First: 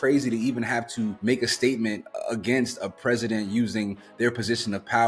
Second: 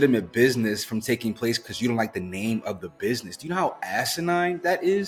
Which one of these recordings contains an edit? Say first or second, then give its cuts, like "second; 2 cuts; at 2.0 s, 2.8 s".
first; 1 cut; at 1.2 s